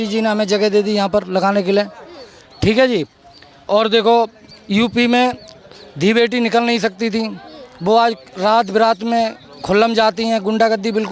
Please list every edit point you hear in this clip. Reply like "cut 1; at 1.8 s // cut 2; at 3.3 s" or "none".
none